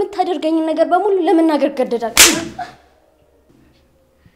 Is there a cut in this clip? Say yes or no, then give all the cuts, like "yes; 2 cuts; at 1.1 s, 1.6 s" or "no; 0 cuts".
no; 0 cuts